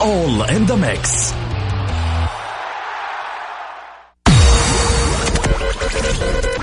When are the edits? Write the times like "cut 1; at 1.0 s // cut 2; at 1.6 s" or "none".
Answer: none